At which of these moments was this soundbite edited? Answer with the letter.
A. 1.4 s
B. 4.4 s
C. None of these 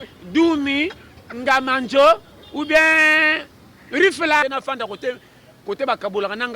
B